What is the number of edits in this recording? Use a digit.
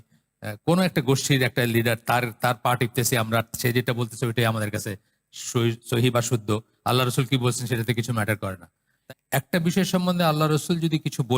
1